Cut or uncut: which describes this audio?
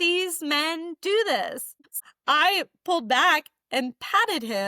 cut